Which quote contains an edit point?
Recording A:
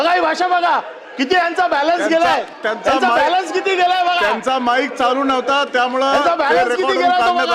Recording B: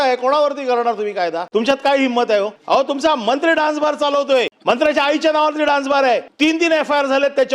B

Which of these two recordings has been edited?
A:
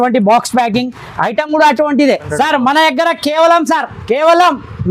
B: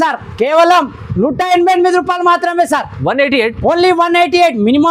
A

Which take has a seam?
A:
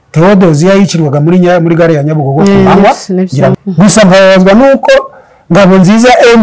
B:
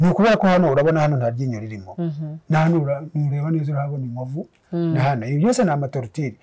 A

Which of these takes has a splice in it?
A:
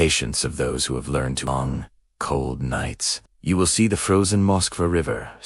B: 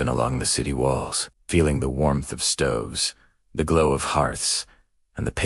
A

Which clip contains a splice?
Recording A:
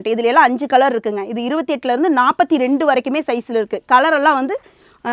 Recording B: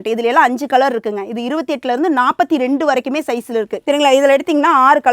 B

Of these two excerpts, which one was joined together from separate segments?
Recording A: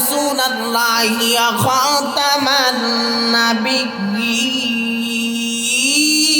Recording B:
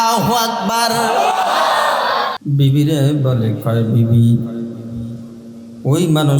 B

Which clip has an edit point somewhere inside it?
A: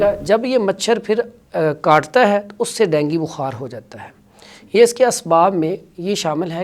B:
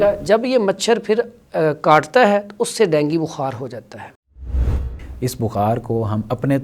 B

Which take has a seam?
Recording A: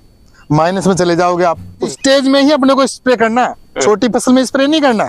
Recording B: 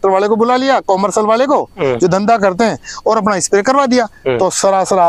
A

